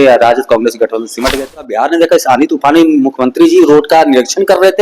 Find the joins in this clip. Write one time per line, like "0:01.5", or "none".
0:01.5